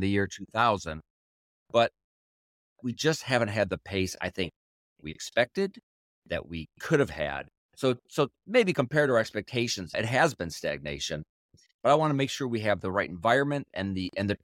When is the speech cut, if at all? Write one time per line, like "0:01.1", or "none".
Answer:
0:09.9
0:11.6